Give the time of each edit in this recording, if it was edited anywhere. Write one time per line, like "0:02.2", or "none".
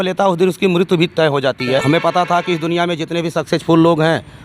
0:01.8

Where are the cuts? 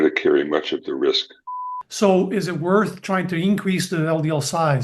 0:01.6

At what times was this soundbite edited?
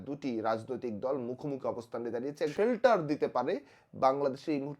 0:02.5

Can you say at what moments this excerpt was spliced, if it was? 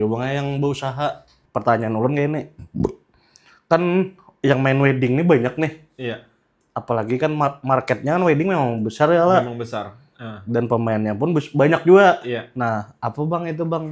0:01.4

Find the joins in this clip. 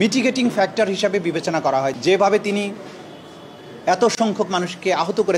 0:01.9

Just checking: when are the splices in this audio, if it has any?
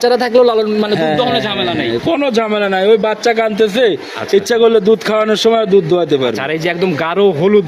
none

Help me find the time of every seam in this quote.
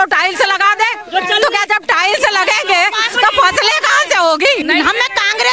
0:04.6

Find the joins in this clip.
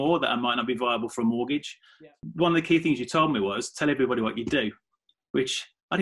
0:02.1

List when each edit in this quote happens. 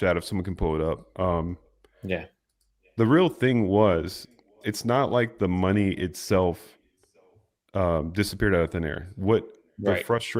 none

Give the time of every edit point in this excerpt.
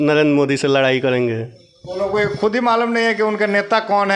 none

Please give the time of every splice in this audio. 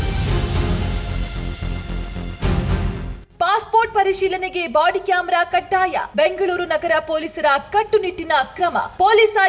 0:03.3

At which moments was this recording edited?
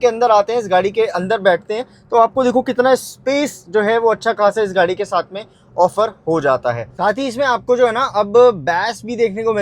0:06.9

